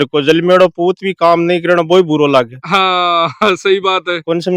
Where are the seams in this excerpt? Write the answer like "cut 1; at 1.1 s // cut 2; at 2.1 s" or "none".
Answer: none